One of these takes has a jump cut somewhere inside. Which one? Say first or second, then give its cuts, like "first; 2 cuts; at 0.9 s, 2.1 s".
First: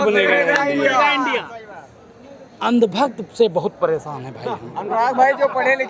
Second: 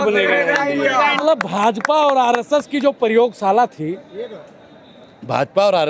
second; 1 cut; at 1.2 s